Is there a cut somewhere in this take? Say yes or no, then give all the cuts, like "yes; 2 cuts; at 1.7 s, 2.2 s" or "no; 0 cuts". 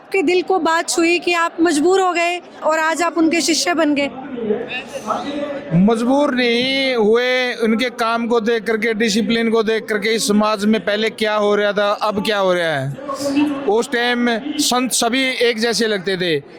no; 0 cuts